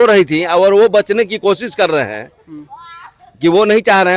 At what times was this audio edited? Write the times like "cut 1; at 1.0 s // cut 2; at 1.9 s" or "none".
none

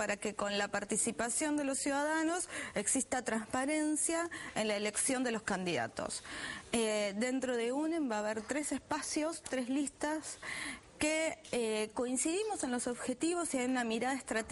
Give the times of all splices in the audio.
cut 1; at 6.2 s

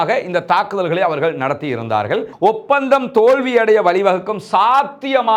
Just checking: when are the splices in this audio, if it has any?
cut 1; at 2.3 s

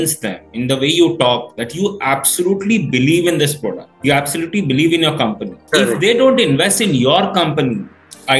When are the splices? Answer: none

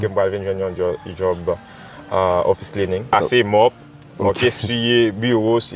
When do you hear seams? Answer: cut 1; at 3.1 s

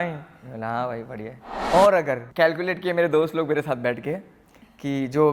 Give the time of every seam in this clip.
cut 1; at 1.5 s // cut 2; at 2.3 s

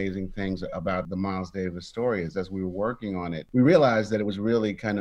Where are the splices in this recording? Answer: cut 1; at 1.1 s

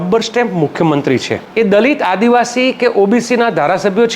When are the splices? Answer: cut 1; at 1.4 s

